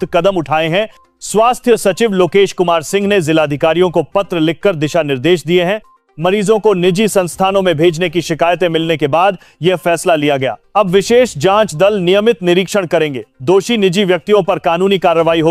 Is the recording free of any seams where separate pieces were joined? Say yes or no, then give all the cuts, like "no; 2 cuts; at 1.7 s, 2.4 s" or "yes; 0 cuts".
yes; 0 cuts